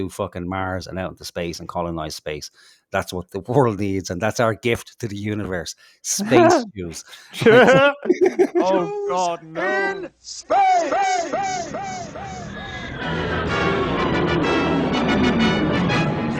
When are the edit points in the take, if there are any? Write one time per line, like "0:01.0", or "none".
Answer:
none

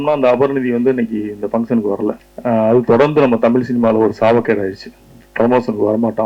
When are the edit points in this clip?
0:02.3

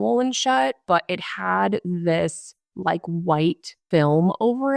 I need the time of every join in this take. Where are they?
0:00.8
0:03.8

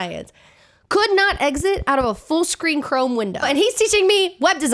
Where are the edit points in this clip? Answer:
0:03.4

